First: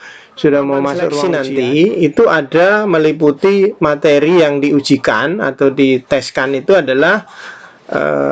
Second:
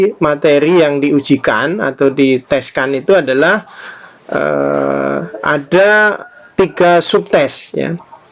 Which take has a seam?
first; 1 cut; at 1.2 s

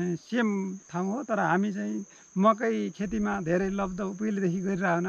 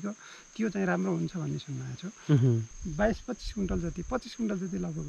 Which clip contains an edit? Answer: second; 1 cut; at 2.8 s

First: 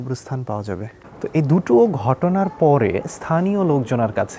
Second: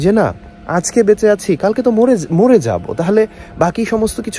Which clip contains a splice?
first; 1 cut; at 1.1 s

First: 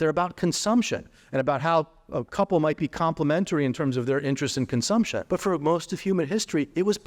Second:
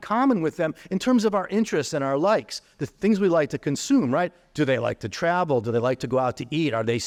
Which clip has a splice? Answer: first; 1 cut; at 5.2 s

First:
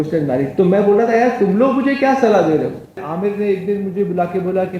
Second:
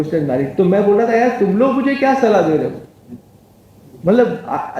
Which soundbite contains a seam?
first; 1 cut; at 3.1 s

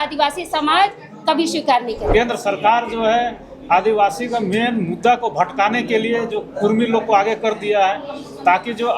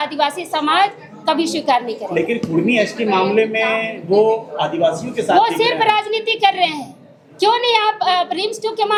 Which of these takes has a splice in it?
first; 1 cut; at 2.1 s

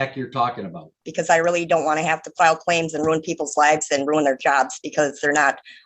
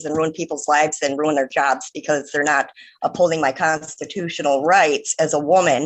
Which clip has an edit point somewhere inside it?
first; 1 cut; at 1.1 s

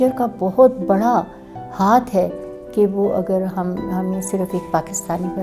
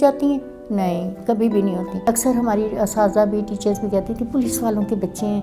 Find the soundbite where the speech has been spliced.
second; 1 cut; at 2.0 s

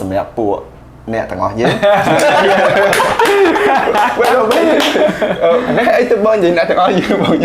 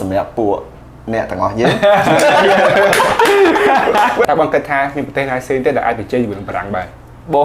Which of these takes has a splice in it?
second; 1 cut; at 4.3 s

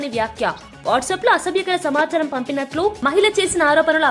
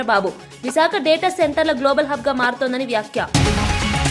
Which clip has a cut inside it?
second; 1 cut; at 3.2 s

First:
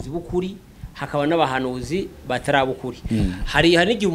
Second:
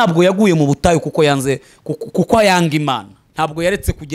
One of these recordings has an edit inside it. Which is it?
second; 1 cut; at 3.2 s

